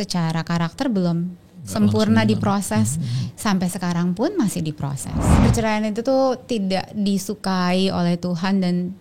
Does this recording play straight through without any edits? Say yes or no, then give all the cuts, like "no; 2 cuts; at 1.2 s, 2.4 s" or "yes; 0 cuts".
no; 1 cut; at 5.4 s